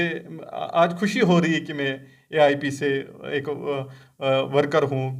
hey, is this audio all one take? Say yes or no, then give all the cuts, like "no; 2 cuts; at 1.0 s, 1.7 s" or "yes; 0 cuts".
yes; 0 cuts